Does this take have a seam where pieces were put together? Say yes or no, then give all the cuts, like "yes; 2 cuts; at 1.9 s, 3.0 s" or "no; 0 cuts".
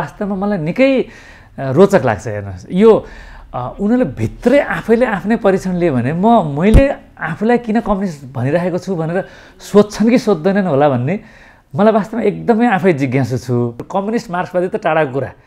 yes; 1 cut; at 13.8 s